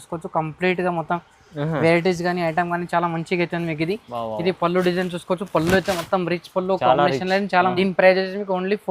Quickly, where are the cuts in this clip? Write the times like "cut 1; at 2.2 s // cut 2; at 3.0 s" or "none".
cut 1; at 7.7 s